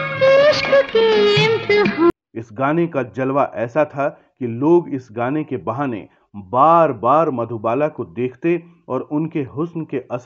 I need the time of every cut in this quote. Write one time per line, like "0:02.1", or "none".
0:02.1